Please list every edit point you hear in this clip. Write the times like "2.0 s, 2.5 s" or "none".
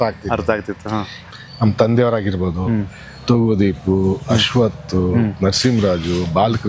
1.2 s